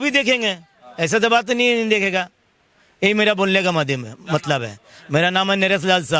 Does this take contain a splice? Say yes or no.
no